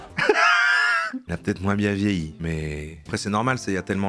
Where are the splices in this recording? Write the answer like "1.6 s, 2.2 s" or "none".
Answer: 3.0 s